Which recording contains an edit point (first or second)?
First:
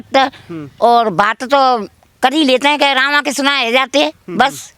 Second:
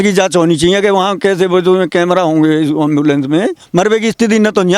second